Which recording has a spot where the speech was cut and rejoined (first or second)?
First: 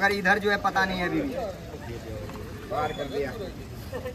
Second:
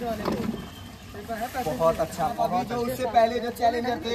second